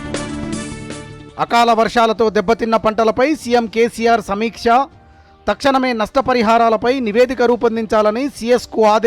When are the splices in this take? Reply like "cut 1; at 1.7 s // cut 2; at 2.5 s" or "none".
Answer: cut 1; at 1.1 s